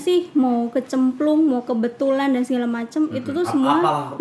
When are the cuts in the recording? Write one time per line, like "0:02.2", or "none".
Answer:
none